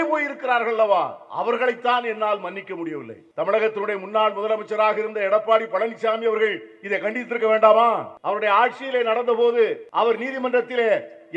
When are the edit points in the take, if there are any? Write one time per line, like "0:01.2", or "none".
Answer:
0:03.2
0:08.1
0:09.8